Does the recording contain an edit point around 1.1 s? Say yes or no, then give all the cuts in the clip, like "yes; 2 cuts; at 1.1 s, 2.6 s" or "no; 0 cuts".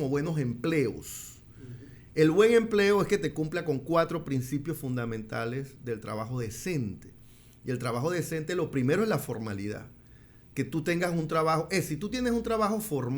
no; 0 cuts